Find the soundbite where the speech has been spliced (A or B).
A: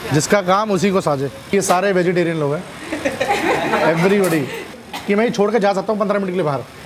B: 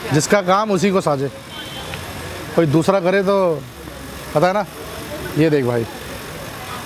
A